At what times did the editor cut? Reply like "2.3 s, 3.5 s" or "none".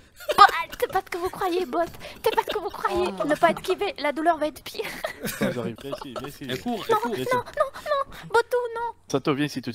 5.8 s

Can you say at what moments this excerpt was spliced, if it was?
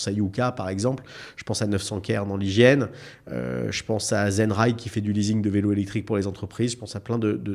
none

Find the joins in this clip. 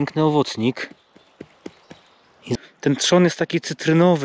2.5 s

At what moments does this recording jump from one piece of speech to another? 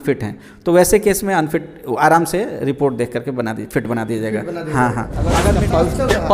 5.4 s

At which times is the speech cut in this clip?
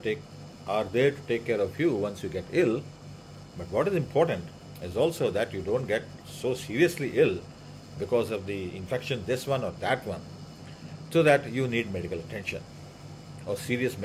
none

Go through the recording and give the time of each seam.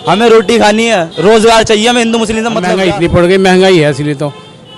2.7 s

